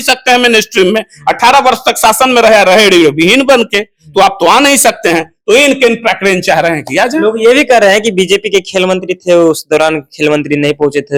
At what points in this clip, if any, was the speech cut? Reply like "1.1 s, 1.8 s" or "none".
none

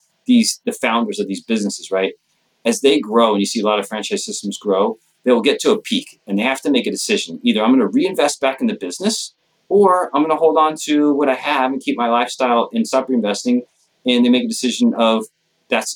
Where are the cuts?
12.9 s

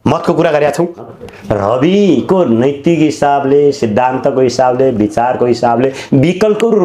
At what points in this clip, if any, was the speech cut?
1.2 s

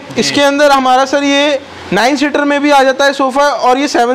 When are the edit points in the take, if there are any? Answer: none

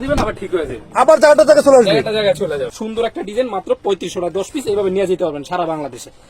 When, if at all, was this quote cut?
2.5 s

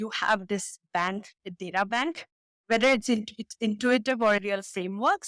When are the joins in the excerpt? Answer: 4.4 s

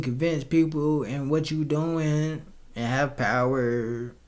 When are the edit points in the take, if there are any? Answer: none

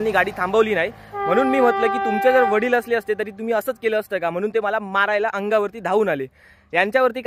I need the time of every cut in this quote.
none

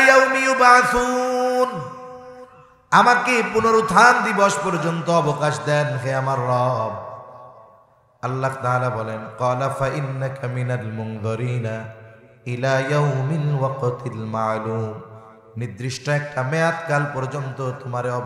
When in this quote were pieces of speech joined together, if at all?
none

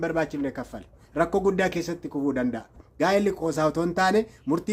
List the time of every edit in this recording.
3.1 s

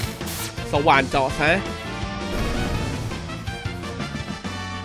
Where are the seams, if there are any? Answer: none

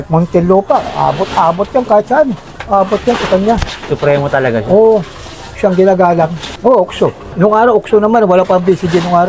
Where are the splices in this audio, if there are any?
none

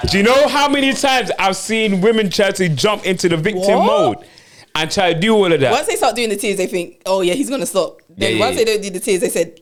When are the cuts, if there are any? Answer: none

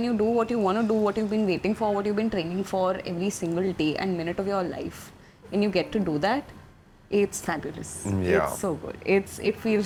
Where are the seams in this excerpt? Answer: none

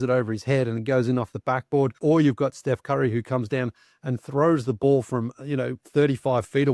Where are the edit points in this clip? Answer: 1.9 s

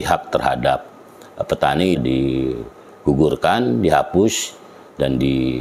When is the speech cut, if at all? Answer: 2.0 s

